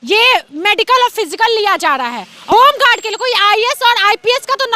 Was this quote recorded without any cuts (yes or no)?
no